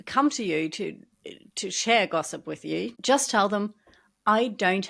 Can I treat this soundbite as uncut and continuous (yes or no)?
no